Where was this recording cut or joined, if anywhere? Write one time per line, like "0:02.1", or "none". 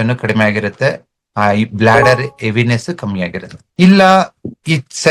none

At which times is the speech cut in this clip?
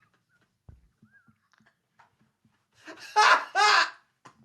none

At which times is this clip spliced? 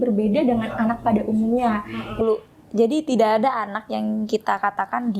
0:02.2

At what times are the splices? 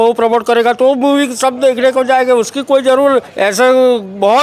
none

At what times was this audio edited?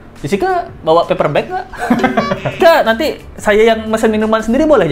0:02.6

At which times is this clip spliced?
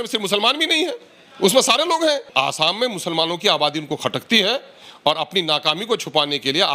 0:02.3

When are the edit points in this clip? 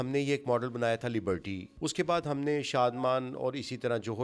0:01.6

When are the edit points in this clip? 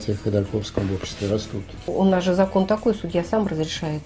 0:01.9

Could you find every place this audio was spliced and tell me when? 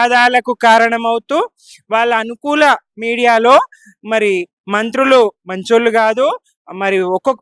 none

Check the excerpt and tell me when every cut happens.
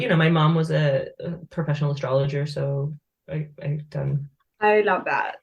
0:04.4

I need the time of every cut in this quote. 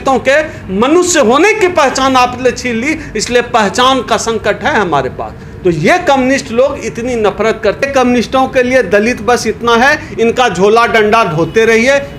0:07.8

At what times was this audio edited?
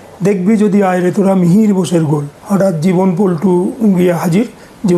0:02.3

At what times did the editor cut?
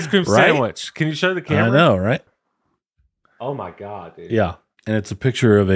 0:02.4
0:04.7

